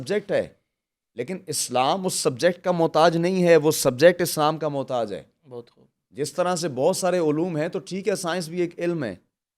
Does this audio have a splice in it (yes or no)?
no